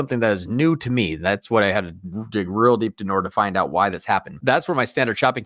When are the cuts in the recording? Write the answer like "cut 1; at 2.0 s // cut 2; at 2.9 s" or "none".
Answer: cut 1; at 4.4 s